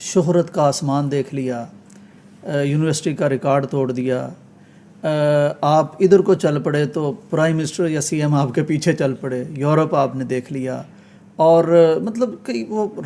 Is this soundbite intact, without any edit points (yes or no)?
yes